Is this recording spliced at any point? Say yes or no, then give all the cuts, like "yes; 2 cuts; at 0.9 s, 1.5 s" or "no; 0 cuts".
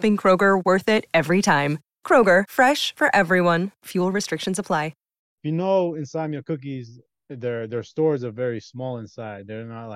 yes; 1 cut; at 5.3 s